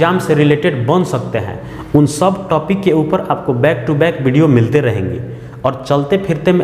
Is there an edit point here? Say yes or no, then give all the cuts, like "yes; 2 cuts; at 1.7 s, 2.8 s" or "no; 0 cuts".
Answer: no; 0 cuts